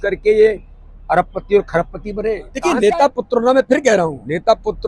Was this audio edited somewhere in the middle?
yes; 1 cut; at 2.5 s

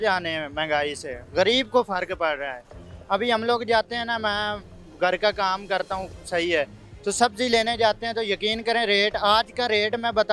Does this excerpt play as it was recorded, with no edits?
yes; 0 cuts

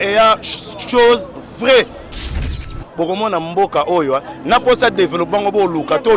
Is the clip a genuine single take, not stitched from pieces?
no; 1 cut; at 2.3 s

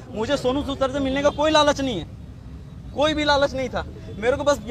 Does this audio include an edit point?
no; 0 cuts

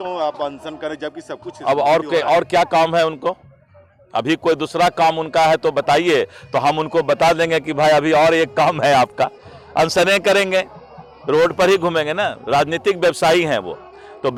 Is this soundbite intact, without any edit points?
yes; 0 cuts

